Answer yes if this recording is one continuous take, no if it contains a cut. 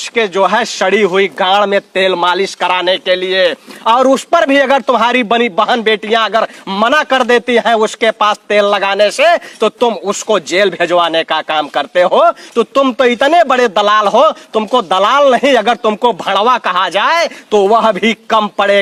yes